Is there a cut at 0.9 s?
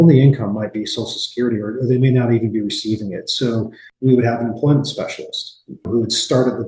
no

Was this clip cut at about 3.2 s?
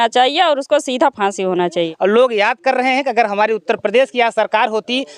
no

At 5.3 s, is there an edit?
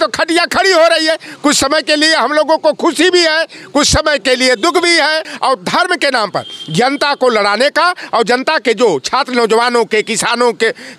yes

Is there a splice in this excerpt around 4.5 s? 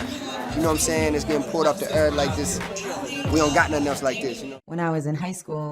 yes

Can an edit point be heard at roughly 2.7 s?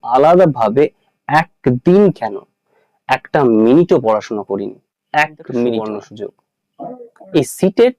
no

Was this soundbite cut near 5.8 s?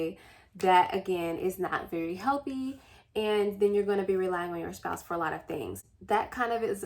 yes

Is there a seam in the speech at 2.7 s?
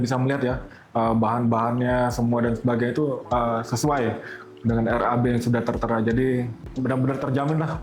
no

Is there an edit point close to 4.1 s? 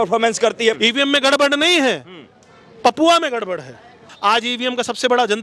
yes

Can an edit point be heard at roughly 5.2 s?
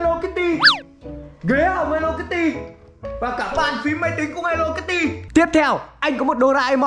yes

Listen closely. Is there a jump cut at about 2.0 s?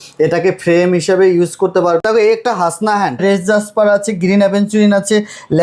yes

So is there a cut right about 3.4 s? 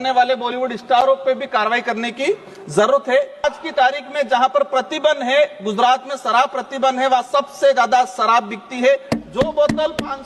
yes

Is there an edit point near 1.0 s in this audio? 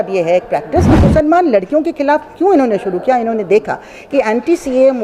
yes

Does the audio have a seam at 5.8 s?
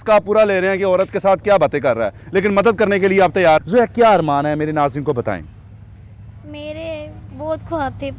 no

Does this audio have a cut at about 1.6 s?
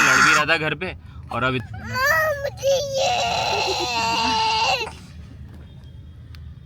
yes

